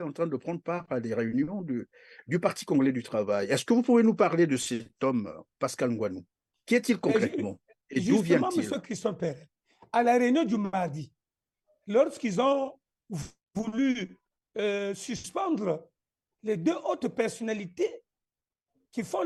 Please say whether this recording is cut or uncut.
uncut